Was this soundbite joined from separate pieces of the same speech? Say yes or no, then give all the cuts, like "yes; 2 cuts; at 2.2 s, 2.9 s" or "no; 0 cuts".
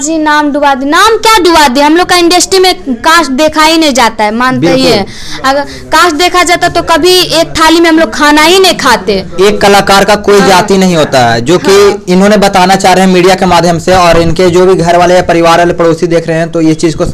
no; 0 cuts